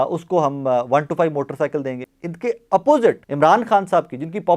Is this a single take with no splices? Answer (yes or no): no